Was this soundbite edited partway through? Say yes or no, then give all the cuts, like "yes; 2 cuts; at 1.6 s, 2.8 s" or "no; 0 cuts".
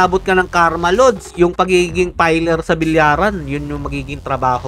no; 0 cuts